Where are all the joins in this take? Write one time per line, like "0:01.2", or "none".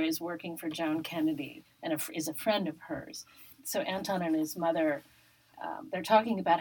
0:03.5
0:05.5

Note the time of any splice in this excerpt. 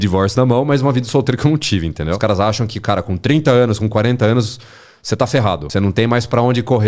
0:02.2
0:05.6

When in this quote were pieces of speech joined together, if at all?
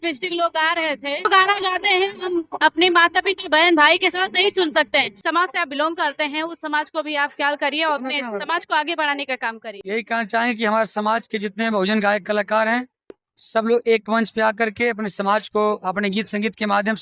0:01.3
0:05.2
0:09.9

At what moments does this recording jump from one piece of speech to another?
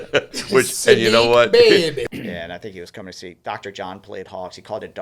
0:02.1

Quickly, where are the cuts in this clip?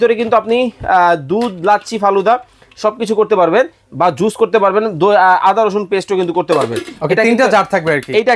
none

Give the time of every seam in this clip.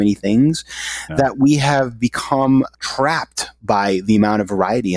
0:02.7

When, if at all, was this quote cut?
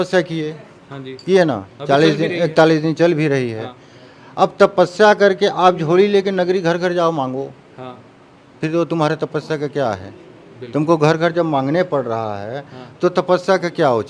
none

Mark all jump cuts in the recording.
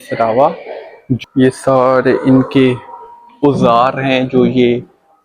0:01.2

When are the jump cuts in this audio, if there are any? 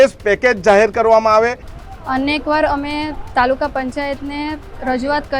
0:01.7

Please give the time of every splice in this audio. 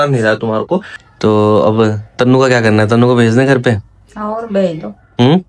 0:01.0

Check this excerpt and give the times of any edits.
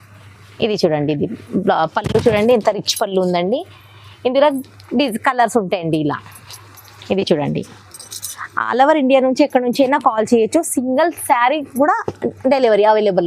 none

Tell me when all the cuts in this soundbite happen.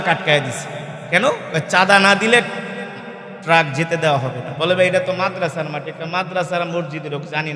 none

